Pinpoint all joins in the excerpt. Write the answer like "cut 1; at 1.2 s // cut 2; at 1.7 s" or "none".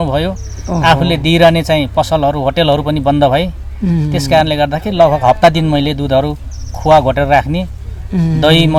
none